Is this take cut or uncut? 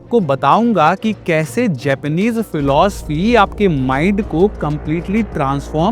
uncut